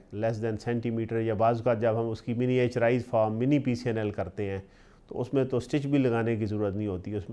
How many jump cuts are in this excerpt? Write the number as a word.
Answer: zero